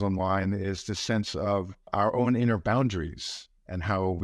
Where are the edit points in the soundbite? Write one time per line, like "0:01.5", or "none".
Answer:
0:01.9